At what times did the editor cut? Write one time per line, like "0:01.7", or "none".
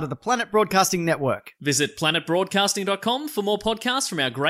none

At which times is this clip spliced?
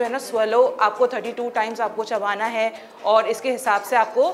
none

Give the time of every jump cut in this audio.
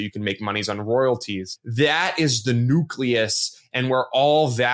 0:01.6

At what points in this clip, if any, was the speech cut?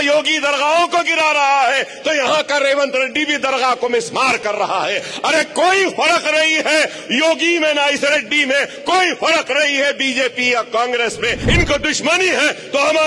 0:03.8
0:11.4

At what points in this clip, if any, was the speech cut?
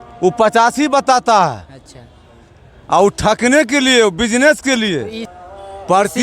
0:05.2

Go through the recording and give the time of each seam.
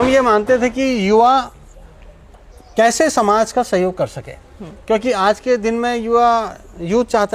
none

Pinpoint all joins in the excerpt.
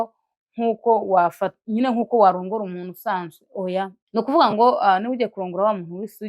0:04.0

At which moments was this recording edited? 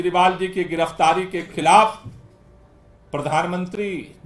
none

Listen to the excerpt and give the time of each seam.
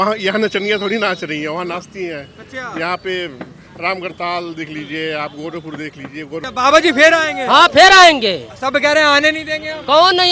0:06.4

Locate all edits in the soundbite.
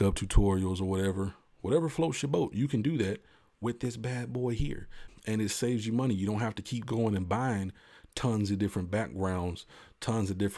0:05.0

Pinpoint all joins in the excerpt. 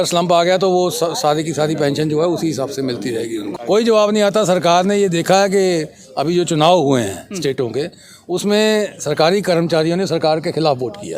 0:03.5

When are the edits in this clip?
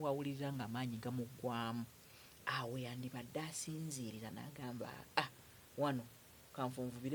none

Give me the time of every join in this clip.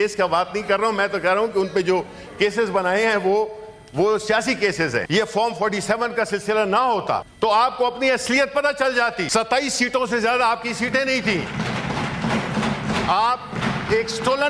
0:05.1
0:07.3
0:09.2
0:13.5

